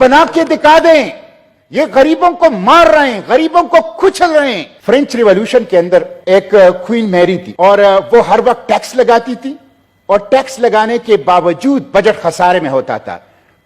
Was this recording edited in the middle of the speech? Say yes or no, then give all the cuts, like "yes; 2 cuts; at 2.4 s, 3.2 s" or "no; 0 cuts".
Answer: yes; 3 cuts; at 4.7 s, 6.1 s, 7.5 s